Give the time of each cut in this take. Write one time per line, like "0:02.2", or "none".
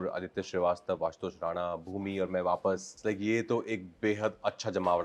0:02.9